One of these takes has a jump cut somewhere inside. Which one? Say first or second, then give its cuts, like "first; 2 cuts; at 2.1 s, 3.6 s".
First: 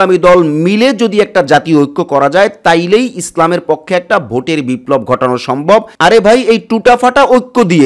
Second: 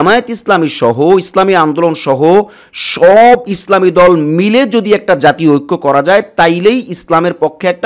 first; 1 cut; at 5.9 s